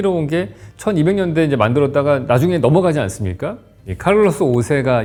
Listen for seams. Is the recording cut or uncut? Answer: uncut